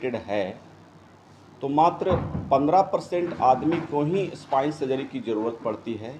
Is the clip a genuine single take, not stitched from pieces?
yes; 0 cuts

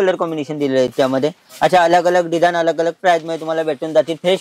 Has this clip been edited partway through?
no; 0 cuts

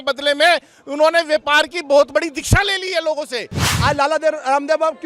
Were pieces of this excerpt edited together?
yes; 1 cut; at 3.7 s

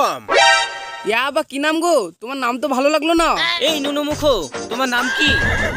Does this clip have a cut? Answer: yes; 1 cut; at 3.5 s

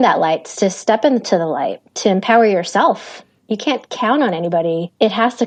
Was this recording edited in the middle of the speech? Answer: no; 0 cuts

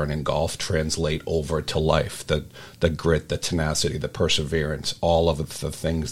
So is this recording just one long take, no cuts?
yes; 0 cuts

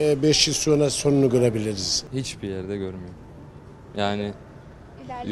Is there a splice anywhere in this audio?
yes; 1 cut; at 2.0 s

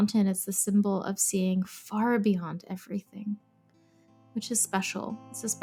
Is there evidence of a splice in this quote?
no; 0 cuts

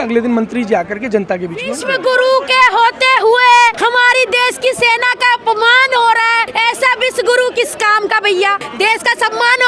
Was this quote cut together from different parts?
yes; 4 cuts; at 1.8 s, 3.8 s, 6.5 s, 8.7 s

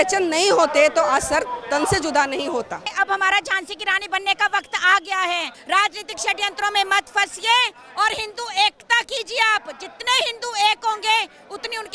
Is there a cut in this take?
yes; 2 cuts; at 2.9 s, 5.5 s

